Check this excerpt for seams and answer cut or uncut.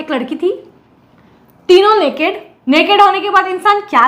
cut